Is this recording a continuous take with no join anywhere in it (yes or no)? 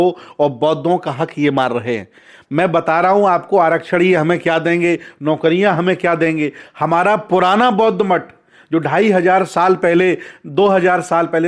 yes